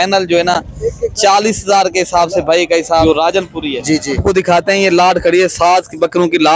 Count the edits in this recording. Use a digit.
2